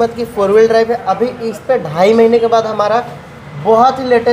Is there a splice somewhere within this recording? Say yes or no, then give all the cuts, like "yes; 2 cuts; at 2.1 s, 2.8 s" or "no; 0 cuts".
no; 0 cuts